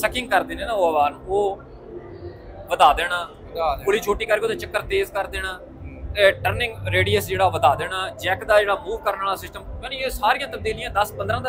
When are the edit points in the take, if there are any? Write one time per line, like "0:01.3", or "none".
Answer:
none